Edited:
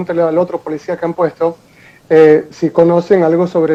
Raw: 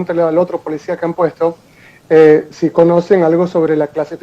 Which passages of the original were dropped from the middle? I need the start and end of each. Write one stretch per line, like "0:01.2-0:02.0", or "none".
none